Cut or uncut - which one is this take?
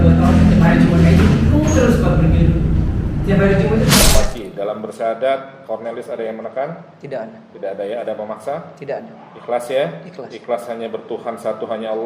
cut